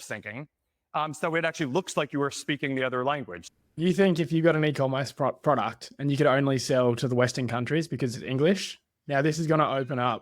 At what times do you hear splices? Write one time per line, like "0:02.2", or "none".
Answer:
0:03.7